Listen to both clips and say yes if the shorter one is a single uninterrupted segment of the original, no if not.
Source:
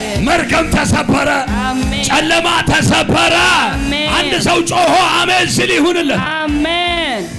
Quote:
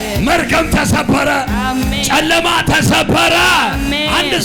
yes